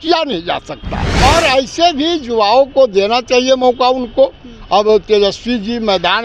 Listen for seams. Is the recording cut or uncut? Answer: cut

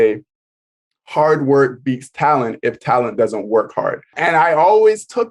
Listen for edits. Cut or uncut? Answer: cut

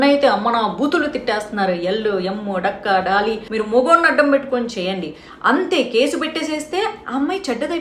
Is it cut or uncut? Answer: cut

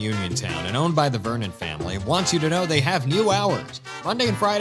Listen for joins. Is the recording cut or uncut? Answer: uncut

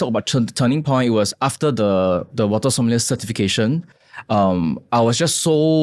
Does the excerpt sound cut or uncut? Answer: uncut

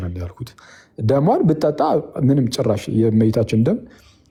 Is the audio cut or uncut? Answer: uncut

